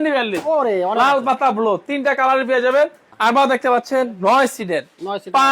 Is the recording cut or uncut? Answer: cut